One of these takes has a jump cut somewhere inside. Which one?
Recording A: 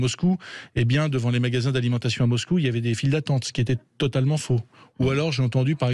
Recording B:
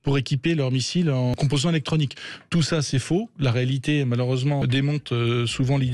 B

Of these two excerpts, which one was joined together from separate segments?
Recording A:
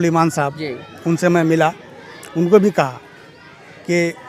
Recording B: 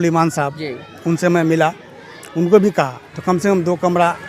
B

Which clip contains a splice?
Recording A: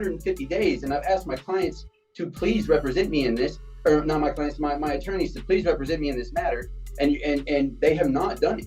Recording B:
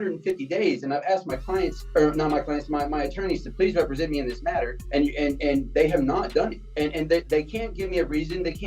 B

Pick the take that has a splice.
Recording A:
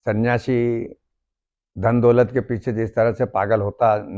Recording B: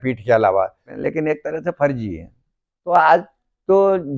B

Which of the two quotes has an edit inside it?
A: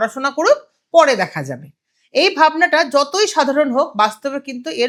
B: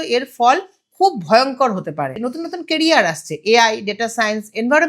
B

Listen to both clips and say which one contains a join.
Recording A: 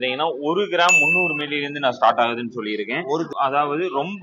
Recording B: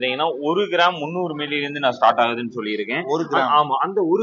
A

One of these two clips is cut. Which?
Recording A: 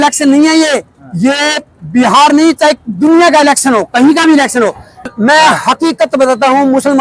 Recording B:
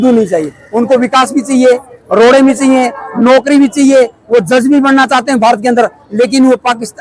A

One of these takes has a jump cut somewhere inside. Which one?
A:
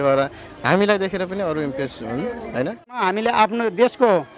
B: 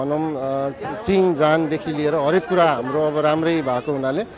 A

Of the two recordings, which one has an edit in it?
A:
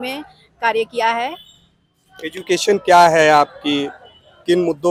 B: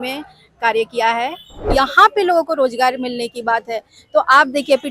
B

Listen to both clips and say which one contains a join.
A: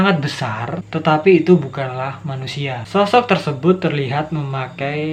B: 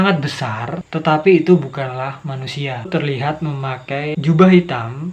B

